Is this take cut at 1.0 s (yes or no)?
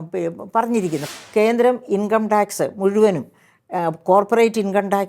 yes